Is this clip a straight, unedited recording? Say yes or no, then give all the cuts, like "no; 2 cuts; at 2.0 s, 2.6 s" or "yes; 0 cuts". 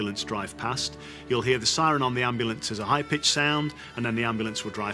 yes; 0 cuts